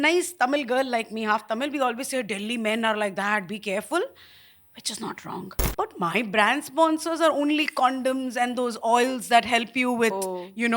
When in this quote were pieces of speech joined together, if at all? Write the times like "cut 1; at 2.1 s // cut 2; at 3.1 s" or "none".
cut 1; at 5.6 s

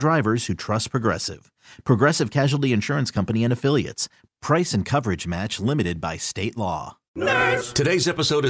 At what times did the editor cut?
cut 1; at 7.0 s

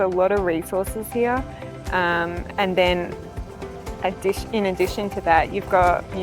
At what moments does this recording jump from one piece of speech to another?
none

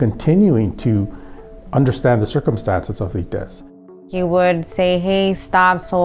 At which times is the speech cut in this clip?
cut 1; at 3.9 s

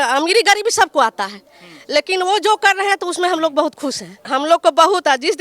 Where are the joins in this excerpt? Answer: cut 1; at 4.2 s

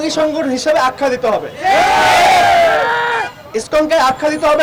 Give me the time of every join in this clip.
none

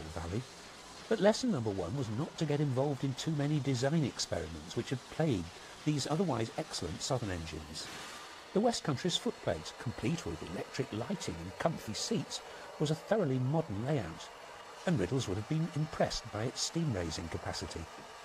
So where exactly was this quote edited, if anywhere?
cut 1; at 11.0 s

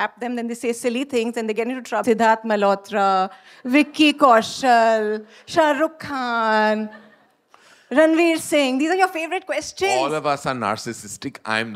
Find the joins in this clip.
cut 1; at 2.0 s

